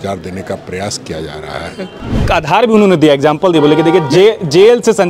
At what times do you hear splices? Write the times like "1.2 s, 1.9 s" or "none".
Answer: 2.3 s